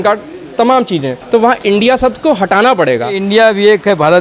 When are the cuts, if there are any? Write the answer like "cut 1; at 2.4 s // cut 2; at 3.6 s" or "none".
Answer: cut 1; at 1.1 s // cut 2; at 3.2 s